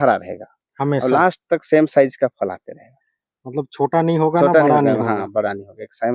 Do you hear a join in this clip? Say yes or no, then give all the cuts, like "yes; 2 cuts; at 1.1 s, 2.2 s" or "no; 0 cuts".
no; 0 cuts